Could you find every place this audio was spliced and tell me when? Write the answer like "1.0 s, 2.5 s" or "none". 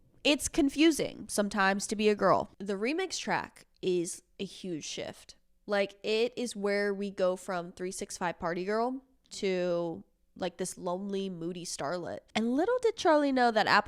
2.5 s, 12.3 s

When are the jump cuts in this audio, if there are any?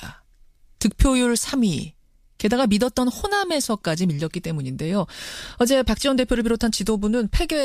none

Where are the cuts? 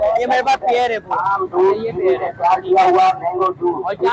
none

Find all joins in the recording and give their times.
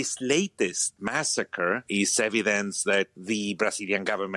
1.8 s

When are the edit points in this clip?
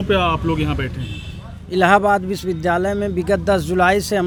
none

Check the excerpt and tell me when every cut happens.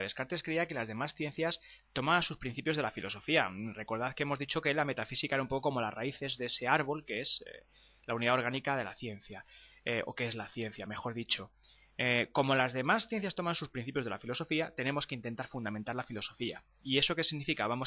none

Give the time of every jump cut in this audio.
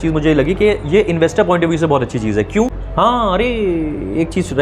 2.8 s

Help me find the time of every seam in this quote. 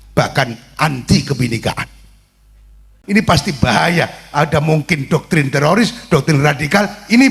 2.9 s

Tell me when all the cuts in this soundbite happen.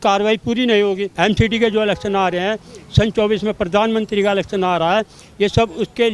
1.1 s

